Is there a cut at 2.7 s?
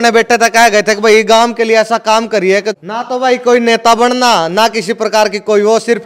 yes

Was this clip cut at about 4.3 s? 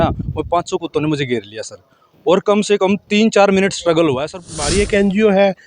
yes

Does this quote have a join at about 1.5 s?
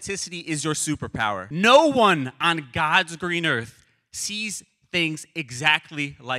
yes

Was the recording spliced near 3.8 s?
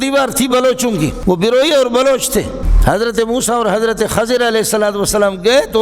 no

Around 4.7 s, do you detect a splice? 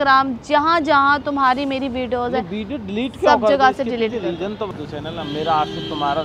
yes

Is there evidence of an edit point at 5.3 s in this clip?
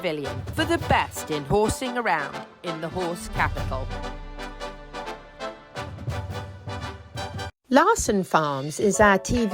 no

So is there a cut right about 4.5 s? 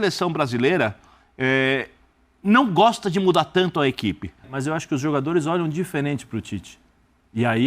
yes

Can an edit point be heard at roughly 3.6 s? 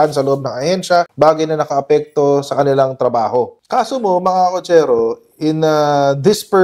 yes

